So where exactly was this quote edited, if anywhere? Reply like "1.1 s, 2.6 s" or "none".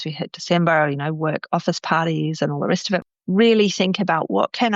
3.0 s